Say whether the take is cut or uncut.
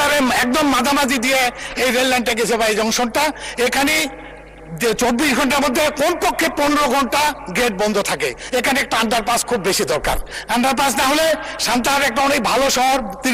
uncut